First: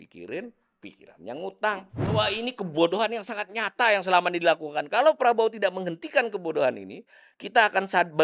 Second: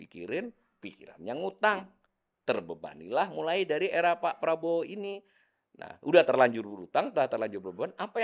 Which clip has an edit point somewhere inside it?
first; 1 cut; at 2.1 s

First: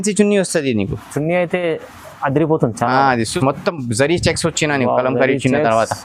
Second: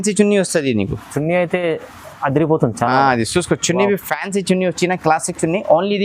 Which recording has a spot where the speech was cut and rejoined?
first; 1 cut; at 3.3 s

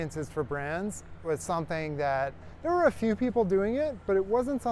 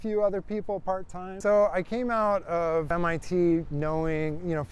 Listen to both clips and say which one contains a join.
second; 2 cuts; at 1.2 s, 2.9 s

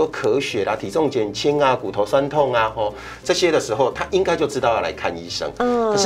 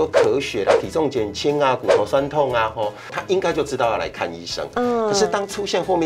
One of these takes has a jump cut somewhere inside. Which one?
second; 1 cut; at 3.2 s

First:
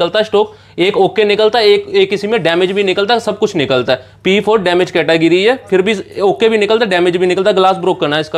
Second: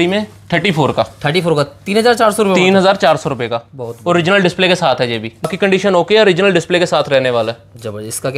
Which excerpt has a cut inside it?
second; 1 cut; at 5.5 s

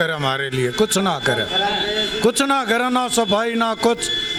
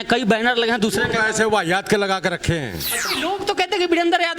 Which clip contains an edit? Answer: second; 1 cut; at 3.1 s

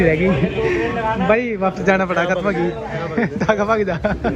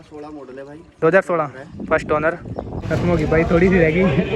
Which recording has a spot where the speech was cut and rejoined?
second; 1 cut; at 2.8 s

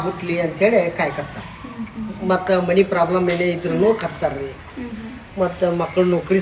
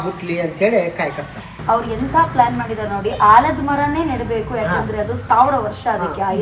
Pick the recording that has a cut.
second; 1 cut; at 1.6 s

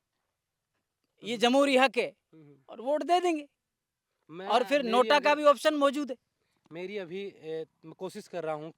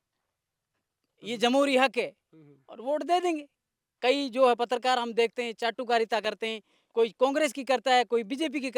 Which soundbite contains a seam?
second; 1 cut; at 3.8 s

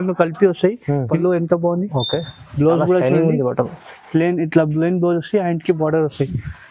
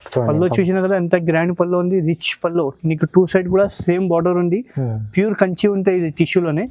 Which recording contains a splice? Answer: first; 1 cut; at 1.1 s

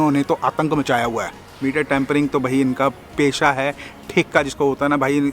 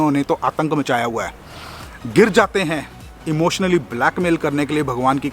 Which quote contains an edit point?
first; 1 cut; at 1.5 s

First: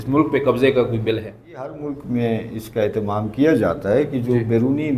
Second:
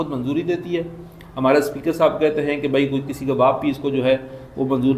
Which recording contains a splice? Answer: first; 1 cut; at 1.7 s

